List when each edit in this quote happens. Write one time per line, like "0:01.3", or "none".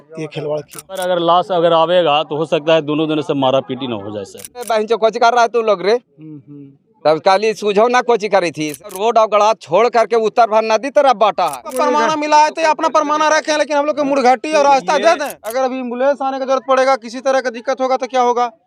0:01.0
0:04.7
0:08.9
0:11.7
0:15.4